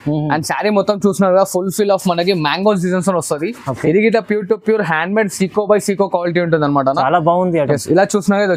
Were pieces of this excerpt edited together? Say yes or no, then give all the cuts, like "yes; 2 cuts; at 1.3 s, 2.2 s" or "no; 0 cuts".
no; 0 cuts